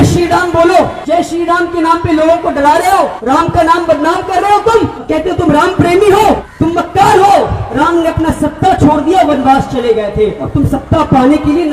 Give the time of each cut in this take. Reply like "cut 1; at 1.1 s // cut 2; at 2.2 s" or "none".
cut 1; at 1.0 s // cut 2; at 3.2 s // cut 3; at 5.0 s // cut 4; at 6.5 s // cut 5; at 7.6 s // cut 6; at 10.4 s